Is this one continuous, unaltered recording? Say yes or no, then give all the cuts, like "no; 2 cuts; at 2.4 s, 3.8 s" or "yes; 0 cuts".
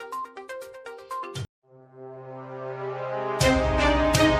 yes; 0 cuts